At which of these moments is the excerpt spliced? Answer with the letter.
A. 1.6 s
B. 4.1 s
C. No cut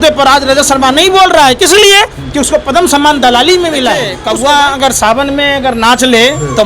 B